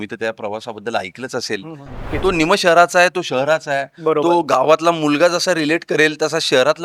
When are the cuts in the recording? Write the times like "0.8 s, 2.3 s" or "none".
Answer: 2.1 s